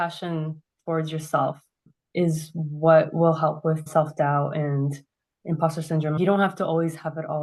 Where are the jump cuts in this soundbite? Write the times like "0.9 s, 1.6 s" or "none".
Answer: none